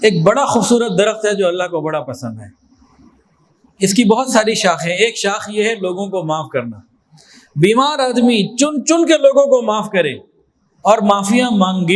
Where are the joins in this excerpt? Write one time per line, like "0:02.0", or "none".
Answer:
none